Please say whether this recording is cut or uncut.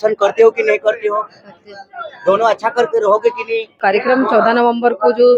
cut